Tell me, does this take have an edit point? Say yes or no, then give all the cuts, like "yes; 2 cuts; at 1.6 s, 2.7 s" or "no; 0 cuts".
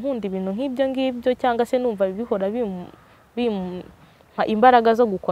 no; 0 cuts